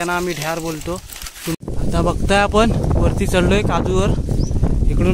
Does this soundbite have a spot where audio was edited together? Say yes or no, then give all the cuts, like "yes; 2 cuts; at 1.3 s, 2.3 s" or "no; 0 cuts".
yes; 1 cut; at 1.6 s